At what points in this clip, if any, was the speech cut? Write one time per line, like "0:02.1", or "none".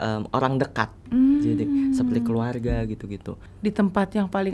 0:03.4